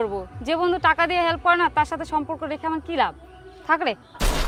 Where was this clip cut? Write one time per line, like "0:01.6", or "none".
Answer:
none